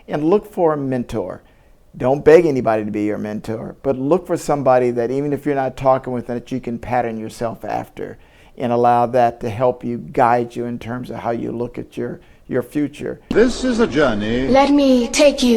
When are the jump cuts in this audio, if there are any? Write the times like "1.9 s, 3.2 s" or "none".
13.2 s